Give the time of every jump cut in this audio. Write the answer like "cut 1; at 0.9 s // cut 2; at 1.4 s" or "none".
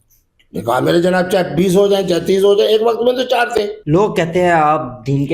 cut 1; at 3.8 s